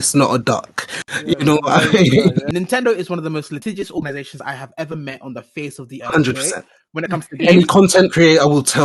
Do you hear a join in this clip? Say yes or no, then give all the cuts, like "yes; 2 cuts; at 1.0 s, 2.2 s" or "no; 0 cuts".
yes; 1 cut; at 2.5 s